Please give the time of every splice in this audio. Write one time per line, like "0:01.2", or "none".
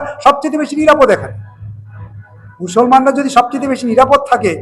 none